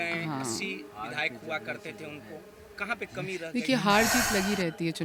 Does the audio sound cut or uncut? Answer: uncut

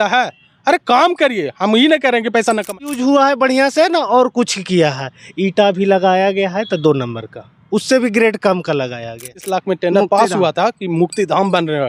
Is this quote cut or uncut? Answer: cut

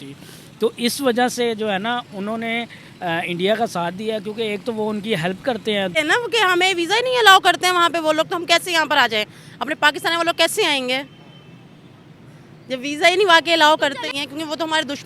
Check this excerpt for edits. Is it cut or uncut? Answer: cut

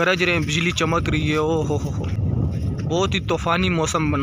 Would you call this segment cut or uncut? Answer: cut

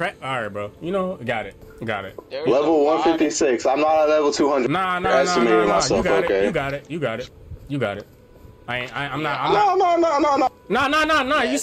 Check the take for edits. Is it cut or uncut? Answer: cut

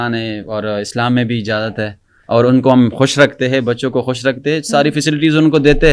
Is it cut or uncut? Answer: uncut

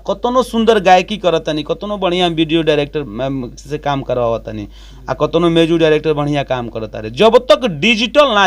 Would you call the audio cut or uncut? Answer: uncut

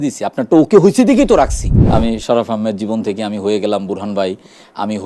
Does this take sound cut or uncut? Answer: cut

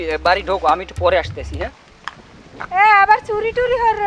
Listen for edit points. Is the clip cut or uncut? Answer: cut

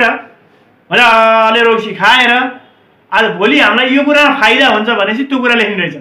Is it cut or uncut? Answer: uncut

